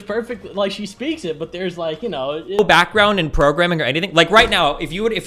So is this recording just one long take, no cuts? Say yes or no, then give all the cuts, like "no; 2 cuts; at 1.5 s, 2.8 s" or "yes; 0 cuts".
no; 1 cut; at 2.6 s